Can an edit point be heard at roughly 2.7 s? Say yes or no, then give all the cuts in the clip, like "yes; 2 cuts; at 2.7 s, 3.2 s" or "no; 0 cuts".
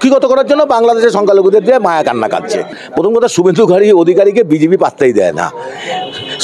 yes; 1 cut; at 2.7 s